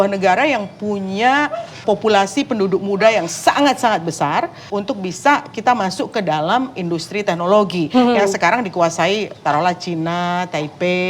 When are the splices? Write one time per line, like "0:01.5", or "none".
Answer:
0:01.8
0:04.6